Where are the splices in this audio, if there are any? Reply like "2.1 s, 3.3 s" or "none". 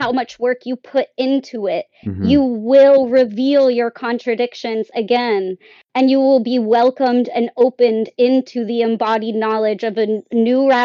none